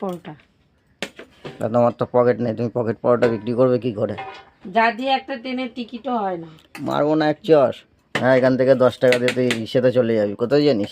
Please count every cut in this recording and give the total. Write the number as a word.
zero